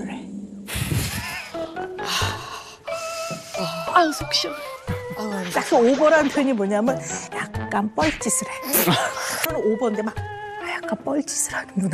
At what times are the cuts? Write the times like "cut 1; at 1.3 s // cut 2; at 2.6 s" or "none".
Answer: cut 1; at 9.5 s